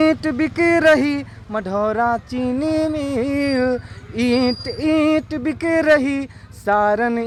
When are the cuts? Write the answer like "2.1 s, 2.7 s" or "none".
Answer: none